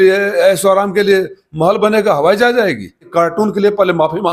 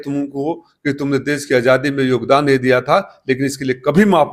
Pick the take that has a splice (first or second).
first